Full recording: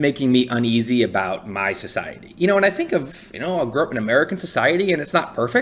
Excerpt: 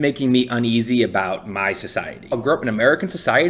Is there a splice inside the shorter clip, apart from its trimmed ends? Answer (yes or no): yes